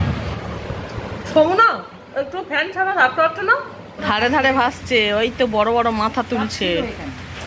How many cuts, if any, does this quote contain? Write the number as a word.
one